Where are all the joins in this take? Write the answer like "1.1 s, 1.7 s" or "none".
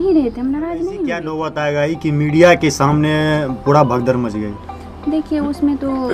1.5 s